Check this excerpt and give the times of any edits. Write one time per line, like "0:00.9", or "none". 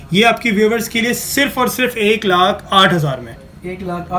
none